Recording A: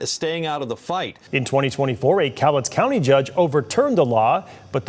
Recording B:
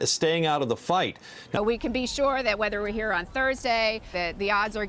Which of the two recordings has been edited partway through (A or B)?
A